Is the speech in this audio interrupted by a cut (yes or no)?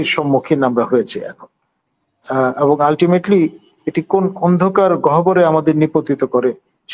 no